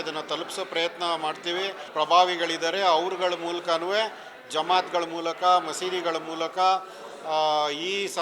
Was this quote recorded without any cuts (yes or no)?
no